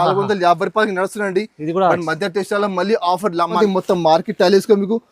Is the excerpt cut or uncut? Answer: cut